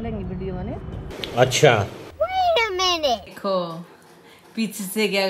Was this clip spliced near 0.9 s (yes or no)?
yes